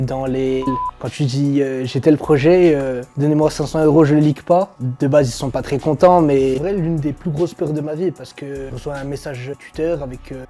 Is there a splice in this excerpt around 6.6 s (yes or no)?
yes